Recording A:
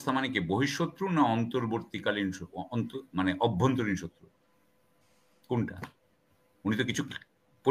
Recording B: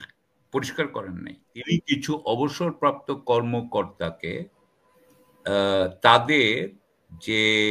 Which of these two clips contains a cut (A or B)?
B